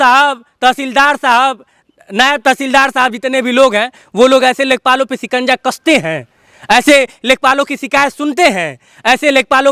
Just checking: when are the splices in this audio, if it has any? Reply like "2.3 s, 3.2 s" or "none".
none